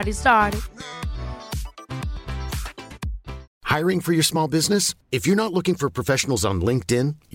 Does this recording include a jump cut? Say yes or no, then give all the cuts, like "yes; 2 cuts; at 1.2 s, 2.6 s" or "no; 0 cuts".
yes; 1 cut; at 3.4 s